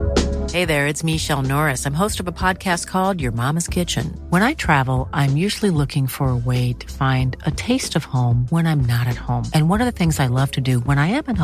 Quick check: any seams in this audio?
no; 0 cuts

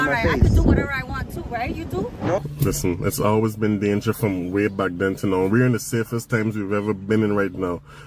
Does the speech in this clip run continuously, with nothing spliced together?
no; 1 cut; at 2.4 s

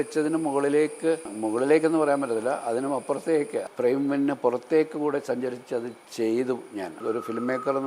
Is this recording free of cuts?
no; 4 cuts; at 1.3 s, 3.6 s, 6.0 s, 7.0 s

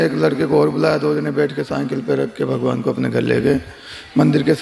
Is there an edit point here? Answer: no; 0 cuts

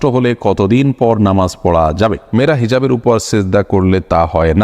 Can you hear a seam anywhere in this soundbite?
yes; 1 cut; at 2.2 s

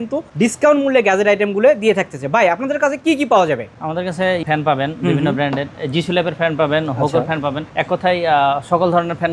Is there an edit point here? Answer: no; 0 cuts

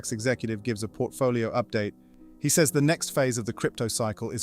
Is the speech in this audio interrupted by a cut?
yes; 1 cut; at 2.0 s

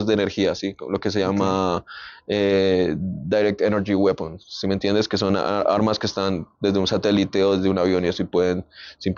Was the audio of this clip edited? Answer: no; 0 cuts

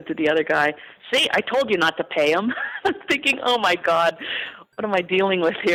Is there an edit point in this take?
no; 0 cuts

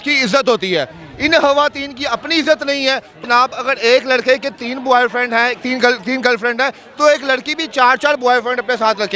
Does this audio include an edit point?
yes; 1 cut; at 3.1 s

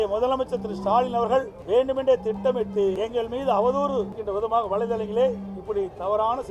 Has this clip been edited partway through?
yes; 3 cuts; at 1.6 s, 3.0 s, 4.2 s

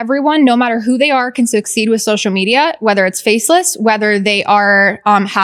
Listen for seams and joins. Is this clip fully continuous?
yes; 0 cuts

